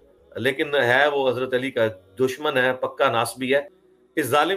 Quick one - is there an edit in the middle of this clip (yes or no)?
yes